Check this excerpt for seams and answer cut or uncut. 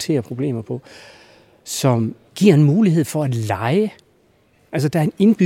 cut